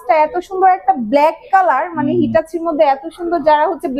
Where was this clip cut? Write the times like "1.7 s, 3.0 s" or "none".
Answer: none